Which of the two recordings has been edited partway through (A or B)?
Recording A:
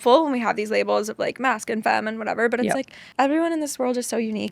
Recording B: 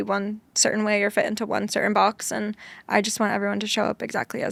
A